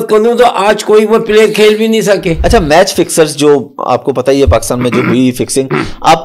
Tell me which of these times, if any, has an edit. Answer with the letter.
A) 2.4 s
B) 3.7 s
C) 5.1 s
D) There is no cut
A